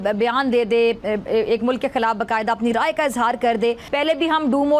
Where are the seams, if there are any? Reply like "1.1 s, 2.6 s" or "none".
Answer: 3.8 s